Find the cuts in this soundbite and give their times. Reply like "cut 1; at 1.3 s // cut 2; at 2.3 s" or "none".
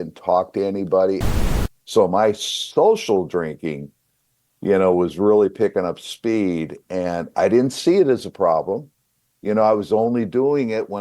cut 1; at 1.3 s